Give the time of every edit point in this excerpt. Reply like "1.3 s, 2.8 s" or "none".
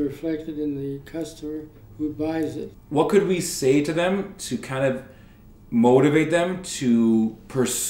2.8 s